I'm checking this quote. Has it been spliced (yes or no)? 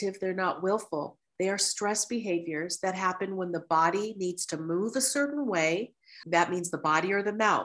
yes